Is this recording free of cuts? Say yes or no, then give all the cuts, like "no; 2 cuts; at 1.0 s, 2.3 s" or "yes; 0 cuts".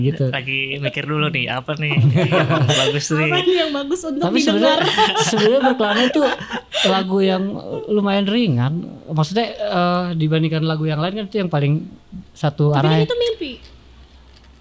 yes; 0 cuts